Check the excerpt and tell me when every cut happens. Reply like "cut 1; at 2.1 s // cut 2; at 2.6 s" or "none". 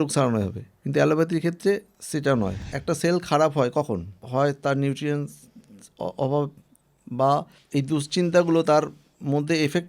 cut 1; at 2.6 s // cut 2; at 4.2 s // cut 3; at 7.6 s